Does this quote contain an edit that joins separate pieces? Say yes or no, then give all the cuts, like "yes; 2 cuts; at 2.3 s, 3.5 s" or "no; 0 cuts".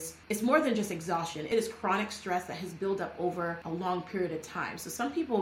yes; 2 cuts; at 1.5 s, 3.6 s